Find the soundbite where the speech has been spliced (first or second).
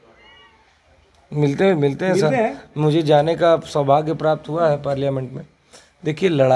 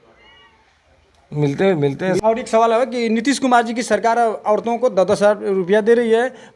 second